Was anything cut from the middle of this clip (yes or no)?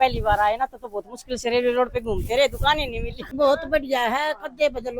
yes